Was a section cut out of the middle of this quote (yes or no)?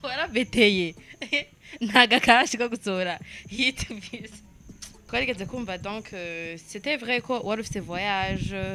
yes